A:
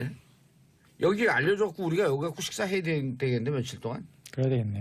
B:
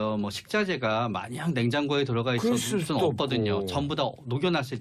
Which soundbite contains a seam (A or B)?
A